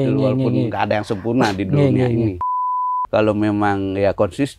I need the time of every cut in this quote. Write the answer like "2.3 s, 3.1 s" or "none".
2.7 s

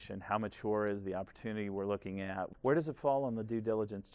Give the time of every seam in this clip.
2.5 s

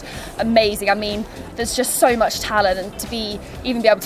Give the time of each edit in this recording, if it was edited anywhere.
none

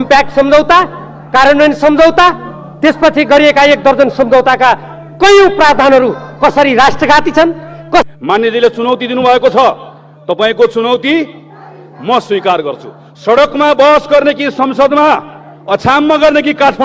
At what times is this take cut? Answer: 8.0 s

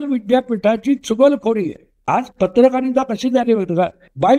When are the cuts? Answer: 1.9 s

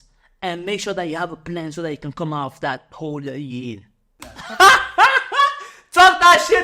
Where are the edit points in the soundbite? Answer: 4.3 s

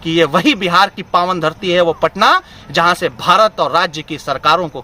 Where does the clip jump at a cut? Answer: none

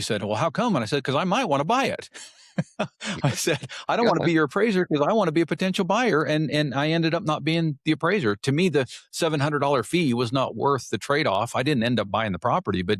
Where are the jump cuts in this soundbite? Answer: none

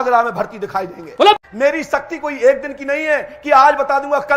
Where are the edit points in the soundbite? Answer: 1.4 s

